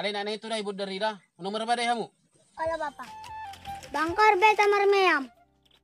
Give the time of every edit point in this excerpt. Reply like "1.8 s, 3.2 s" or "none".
3.3 s